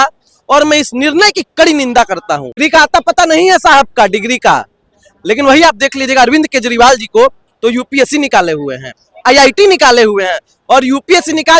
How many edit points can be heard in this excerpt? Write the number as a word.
one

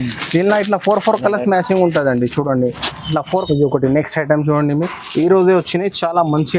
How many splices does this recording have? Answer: one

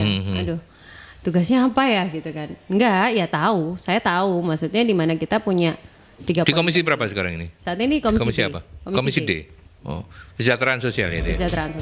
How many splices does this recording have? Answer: zero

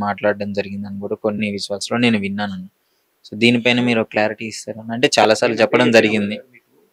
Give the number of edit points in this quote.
zero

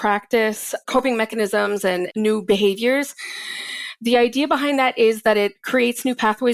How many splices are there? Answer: two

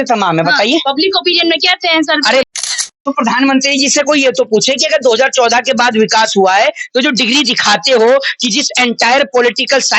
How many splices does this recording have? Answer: one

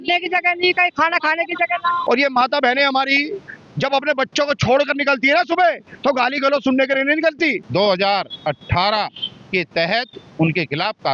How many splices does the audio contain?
two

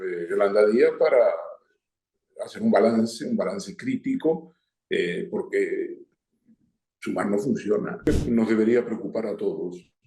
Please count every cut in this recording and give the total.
one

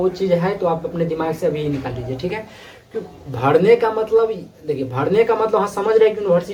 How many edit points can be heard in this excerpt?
zero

